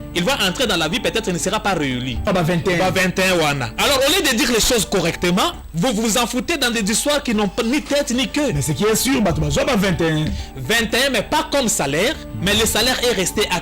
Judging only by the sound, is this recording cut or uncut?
cut